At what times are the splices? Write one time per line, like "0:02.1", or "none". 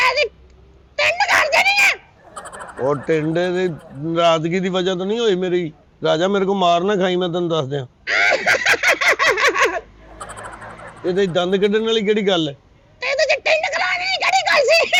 none